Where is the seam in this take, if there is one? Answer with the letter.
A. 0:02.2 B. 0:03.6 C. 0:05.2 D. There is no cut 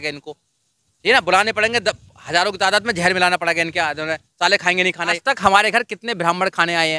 C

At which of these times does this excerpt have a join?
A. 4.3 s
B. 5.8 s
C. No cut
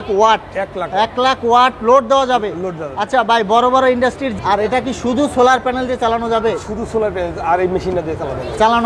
A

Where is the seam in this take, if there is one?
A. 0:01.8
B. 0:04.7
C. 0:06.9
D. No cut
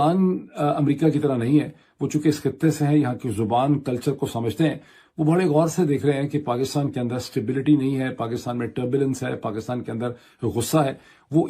D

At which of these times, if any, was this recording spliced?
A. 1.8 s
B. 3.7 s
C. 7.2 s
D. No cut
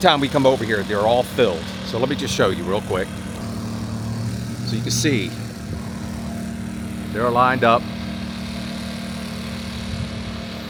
D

